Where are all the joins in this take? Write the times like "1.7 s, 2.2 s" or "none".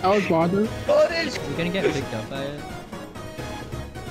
1.3 s